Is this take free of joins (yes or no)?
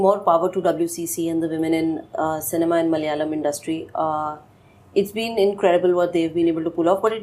yes